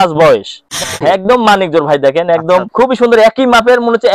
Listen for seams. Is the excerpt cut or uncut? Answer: cut